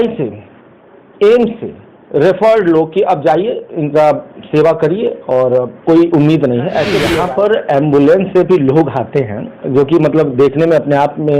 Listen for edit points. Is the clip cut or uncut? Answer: cut